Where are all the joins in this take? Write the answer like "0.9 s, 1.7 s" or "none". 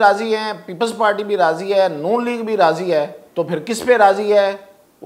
3.2 s